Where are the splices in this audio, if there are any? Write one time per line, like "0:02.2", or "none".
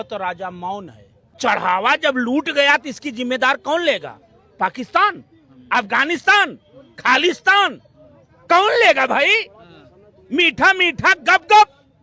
0:01.4